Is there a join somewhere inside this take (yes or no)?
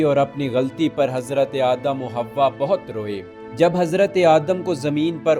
yes